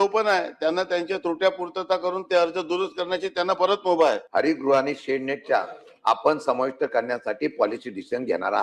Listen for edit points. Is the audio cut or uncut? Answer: cut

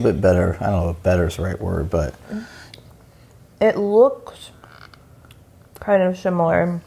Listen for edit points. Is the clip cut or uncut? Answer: cut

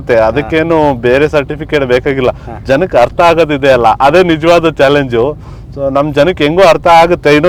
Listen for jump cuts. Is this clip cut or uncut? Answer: uncut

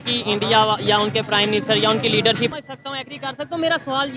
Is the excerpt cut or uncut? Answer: cut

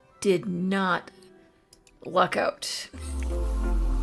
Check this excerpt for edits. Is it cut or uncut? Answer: cut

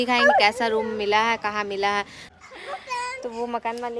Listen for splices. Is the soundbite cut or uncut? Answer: cut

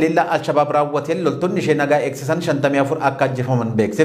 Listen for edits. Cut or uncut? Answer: uncut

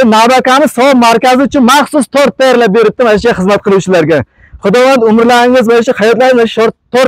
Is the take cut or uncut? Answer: uncut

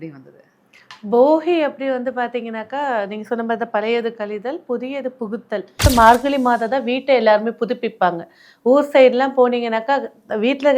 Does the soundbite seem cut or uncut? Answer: cut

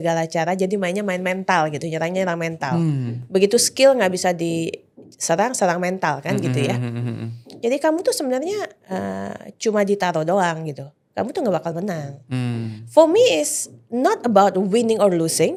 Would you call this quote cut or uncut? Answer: uncut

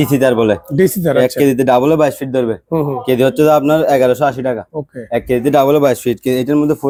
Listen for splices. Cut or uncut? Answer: uncut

